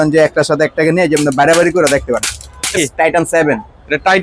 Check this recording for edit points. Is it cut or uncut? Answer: cut